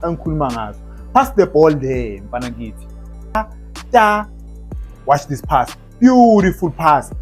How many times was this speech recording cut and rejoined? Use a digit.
1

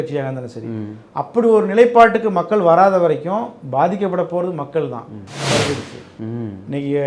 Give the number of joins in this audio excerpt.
1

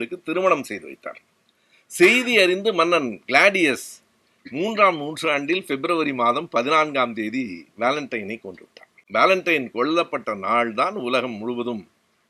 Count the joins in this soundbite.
1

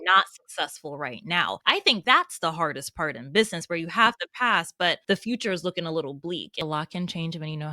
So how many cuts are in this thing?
3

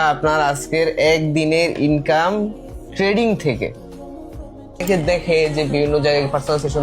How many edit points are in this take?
1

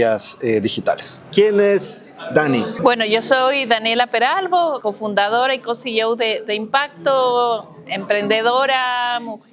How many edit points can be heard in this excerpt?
3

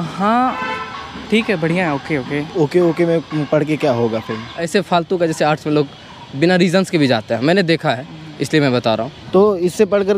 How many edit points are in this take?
3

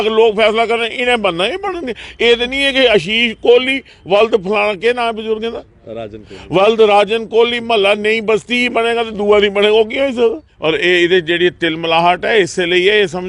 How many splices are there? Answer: 1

